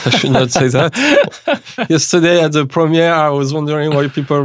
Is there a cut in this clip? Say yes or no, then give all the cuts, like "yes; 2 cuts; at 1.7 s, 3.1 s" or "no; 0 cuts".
no; 0 cuts